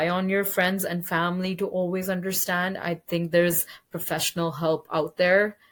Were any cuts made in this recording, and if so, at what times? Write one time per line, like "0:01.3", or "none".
none